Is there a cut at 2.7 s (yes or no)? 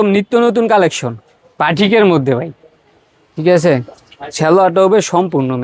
no